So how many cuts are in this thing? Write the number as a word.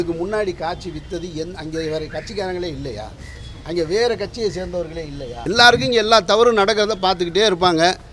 one